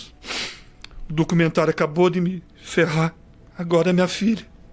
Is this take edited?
no; 0 cuts

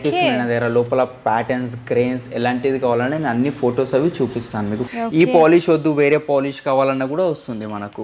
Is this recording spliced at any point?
yes; 1 cut; at 4.9 s

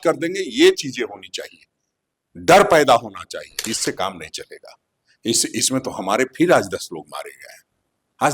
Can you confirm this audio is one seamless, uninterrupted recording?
no; 1 cut; at 3.6 s

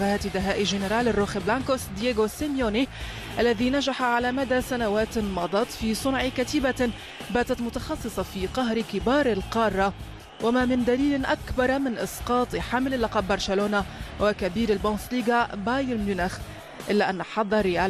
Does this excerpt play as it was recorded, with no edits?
no; 1 cut; at 3.6 s

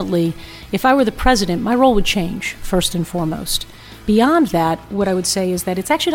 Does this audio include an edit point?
yes; 2 cuts; at 4.0 s, 4.9 s

